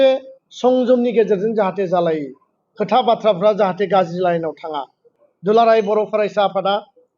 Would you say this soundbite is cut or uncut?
cut